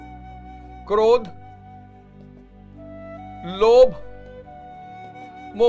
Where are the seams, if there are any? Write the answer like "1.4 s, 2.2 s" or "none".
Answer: 1.5 s, 3.4 s